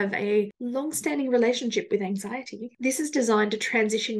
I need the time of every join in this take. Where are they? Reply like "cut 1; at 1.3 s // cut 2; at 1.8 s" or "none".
cut 1; at 2.8 s